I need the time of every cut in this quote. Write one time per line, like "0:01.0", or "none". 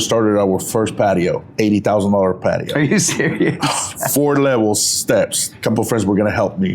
0:01.5
0:03.9
0:05.4